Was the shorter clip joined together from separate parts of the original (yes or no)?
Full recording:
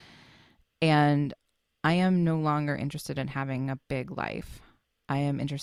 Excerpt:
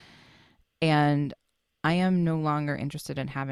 no